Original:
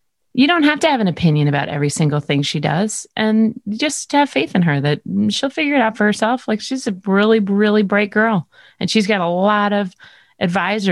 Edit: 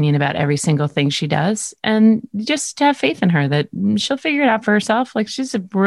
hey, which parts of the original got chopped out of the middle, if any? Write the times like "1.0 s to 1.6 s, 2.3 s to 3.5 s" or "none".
none